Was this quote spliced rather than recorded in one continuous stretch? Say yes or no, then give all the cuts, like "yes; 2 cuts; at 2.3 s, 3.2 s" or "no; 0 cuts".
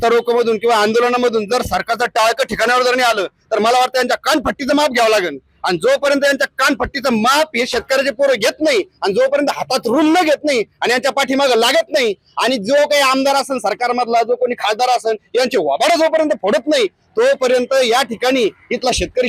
no; 0 cuts